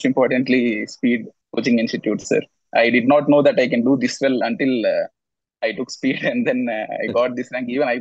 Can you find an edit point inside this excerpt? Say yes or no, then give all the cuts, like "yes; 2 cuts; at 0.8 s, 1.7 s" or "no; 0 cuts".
yes; 1 cut; at 1.4 s